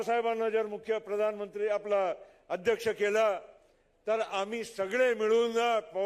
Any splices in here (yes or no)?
no